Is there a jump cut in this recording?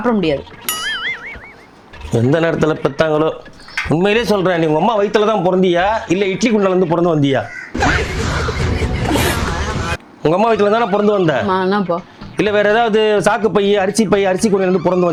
no; 0 cuts

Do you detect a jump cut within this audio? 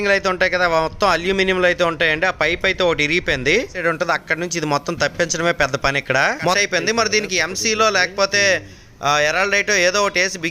yes; 2 cuts; at 3.7 s, 6.6 s

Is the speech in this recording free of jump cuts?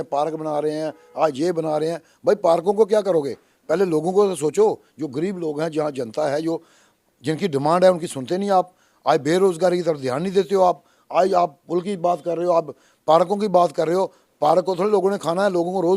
yes; 0 cuts

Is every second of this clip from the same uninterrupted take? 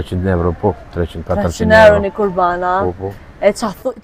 yes; 0 cuts

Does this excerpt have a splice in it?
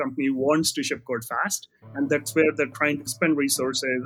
yes; 1 cut; at 3.1 s

